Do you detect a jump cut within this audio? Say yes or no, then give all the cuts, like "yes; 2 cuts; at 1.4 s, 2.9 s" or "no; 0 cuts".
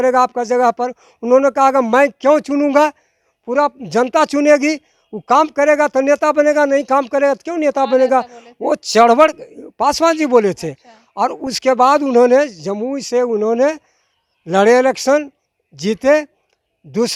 no; 0 cuts